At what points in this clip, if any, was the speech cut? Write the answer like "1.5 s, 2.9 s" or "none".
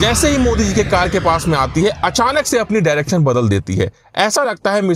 none